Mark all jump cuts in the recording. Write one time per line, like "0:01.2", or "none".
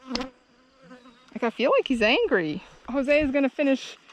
none